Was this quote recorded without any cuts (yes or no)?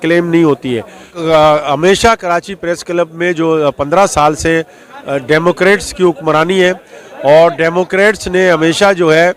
yes